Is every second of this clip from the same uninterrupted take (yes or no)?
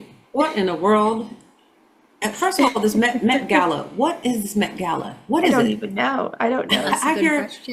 yes